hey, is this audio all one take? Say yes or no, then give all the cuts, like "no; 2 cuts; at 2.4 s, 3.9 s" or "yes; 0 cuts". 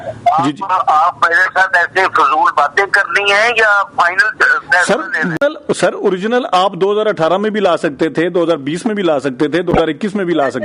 no; 1 cut; at 5.4 s